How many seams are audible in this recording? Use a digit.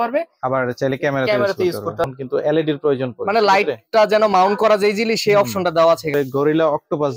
2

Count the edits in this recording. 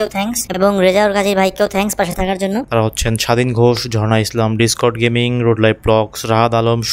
1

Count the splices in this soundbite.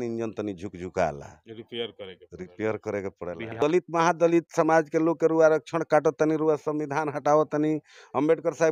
1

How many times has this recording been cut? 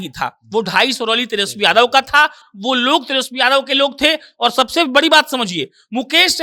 0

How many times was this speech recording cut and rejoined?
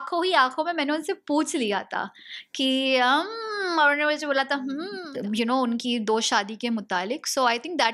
1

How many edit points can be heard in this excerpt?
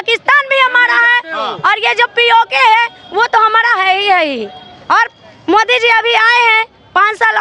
0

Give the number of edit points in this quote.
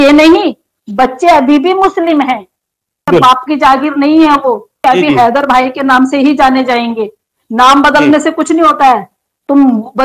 2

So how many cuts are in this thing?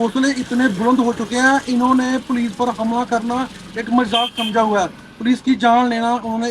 0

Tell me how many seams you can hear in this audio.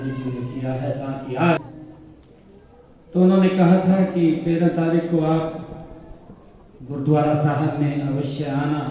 1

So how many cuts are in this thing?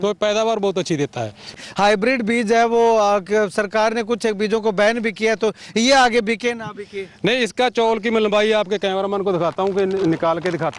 1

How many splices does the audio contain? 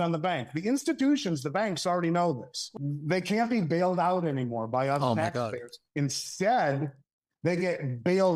1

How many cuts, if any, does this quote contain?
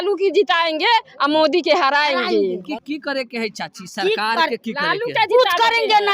1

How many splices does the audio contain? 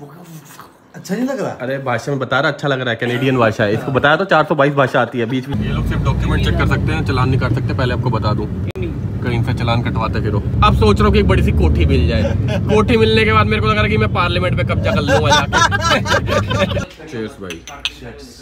3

